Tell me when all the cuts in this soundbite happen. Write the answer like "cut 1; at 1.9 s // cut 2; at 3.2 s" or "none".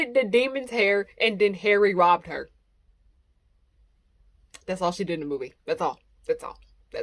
none